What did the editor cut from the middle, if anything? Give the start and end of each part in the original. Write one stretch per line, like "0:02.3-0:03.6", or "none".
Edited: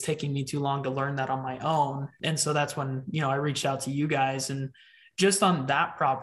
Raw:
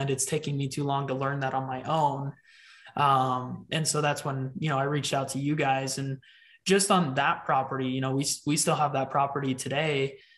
0:02.4-0:03.6